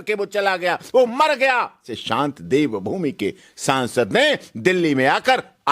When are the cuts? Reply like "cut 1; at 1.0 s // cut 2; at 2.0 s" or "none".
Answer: cut 1; at 2.0 s

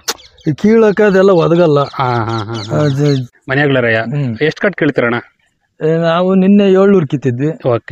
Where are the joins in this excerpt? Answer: cut 1; at 3.3 s

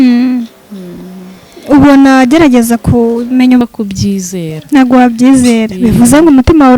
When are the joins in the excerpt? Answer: cut 1; at 3.6 s

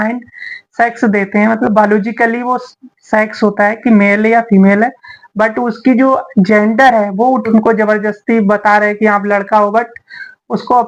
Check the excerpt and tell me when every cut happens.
cut 1; at 7.5 s

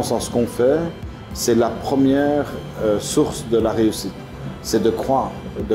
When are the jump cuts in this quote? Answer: none

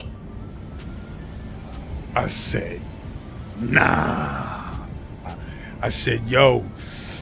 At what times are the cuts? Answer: cut 1; at 5.3 s

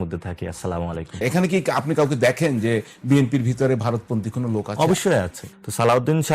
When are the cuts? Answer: cut 1; at 1.2 s // cut 2; at 5.4 s

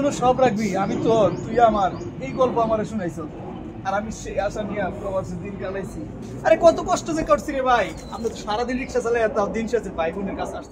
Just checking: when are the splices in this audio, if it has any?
none

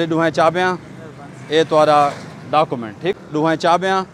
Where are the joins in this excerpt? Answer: cut 1; at 3.1 s

